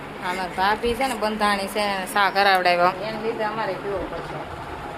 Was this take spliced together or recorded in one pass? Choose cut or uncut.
cut